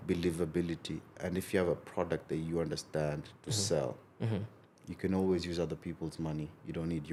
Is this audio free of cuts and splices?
yes; 0 cuts

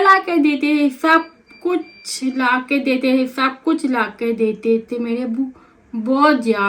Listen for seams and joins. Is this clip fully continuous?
yes; 0 cuts

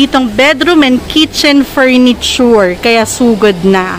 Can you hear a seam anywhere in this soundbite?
no; 0 cuts

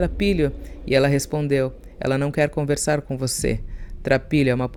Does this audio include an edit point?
no; 0 cuts

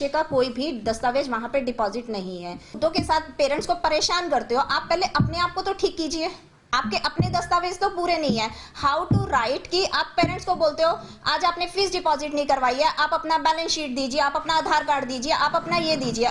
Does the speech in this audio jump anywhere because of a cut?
yes; 1 cut; at 2.8 s

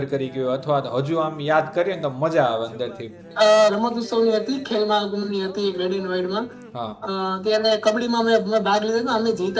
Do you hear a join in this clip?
yes; 1 cut; at 3.2 s

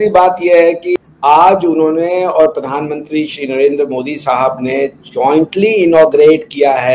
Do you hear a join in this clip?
yes; 1 cut; at 1.0 s

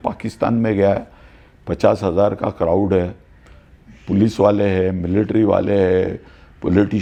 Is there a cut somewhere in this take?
no; 0 cuts

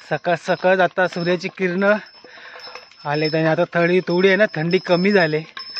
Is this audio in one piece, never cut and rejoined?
yes; 0 cuts

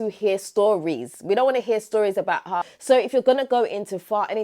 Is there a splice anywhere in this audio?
yes; 1 cut; at 2.6 s

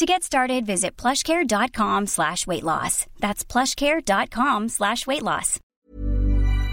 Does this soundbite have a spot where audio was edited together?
yes; 1 cut; at 5.7 s

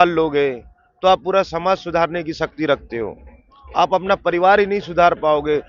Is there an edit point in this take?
no; 0 cuts

